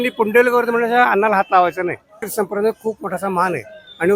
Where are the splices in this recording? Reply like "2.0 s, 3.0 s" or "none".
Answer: 2.2 s